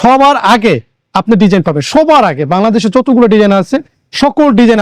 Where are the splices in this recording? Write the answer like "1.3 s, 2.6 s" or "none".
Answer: none